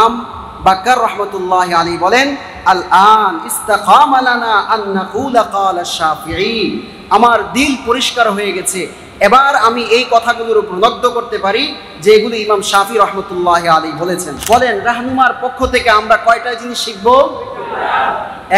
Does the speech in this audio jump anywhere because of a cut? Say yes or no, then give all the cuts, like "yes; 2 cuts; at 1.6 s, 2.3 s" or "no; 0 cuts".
yes; 1 cut; at 14.3 s